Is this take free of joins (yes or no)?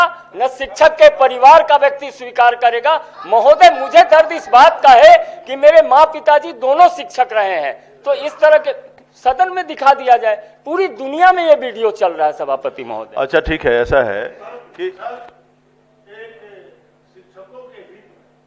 yes